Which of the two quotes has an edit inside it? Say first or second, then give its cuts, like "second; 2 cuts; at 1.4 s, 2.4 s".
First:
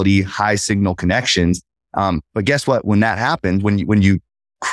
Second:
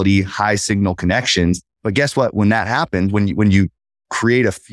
second; 1 cut; at 1.8 s